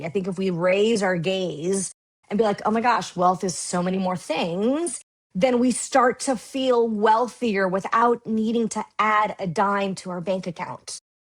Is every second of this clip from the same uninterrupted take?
yes; 0 cuts

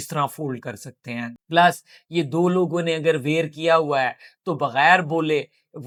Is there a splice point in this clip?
no; 0 cuts

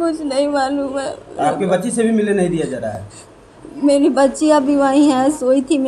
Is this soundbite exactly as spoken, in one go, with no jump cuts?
yes; 0 cuts

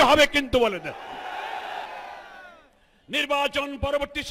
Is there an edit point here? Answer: yes; 1 cut; at 1.9 s

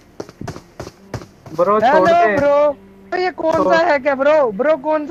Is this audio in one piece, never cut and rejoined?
yes; 0 cuts

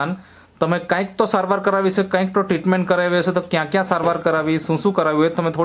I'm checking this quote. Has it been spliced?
no; 0 cuts

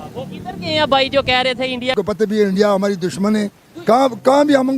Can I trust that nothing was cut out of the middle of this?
no; 1 cut; at 1.9 s

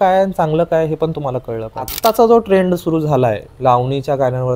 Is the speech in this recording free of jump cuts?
no; 2 cuts; at 1.9 s, 3.5 s

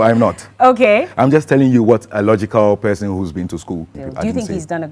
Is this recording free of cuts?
no; 1 cut; at 4.0 s

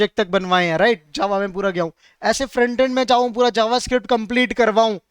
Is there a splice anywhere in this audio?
no; 0 cuts

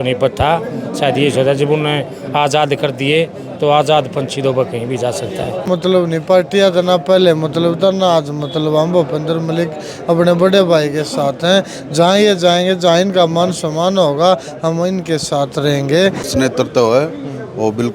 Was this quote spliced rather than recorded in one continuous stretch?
yes; 2 cuts; at 5.7 s, 16.3 s

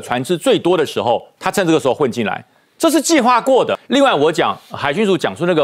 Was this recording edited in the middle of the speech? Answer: no; 0 cuts

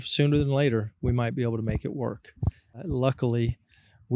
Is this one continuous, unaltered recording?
no; 1 cut; at 2.8 s

